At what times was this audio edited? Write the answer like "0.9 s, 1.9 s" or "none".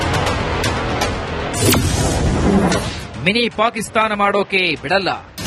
1.5 s, 2.9 s